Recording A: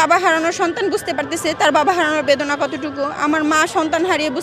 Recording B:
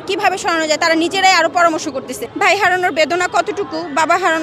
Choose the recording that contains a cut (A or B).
B